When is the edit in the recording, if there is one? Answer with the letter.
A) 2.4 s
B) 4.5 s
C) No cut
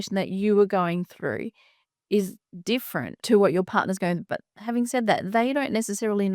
C